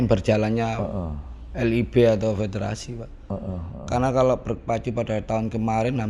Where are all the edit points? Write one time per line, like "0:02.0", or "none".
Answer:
none